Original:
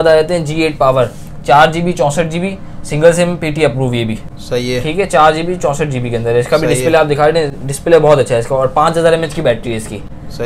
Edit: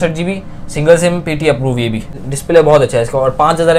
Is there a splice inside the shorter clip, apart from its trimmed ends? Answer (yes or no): yes